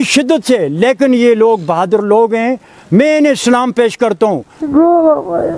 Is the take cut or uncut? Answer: cut